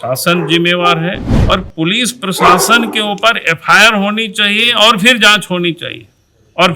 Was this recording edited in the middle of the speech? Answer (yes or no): yes